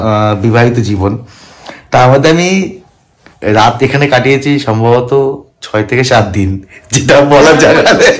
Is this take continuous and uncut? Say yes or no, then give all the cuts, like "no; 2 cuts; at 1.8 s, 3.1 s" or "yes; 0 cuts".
yes; 0 cuts